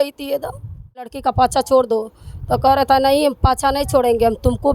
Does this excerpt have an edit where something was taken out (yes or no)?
yes